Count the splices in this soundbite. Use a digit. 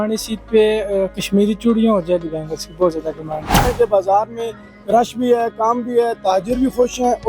1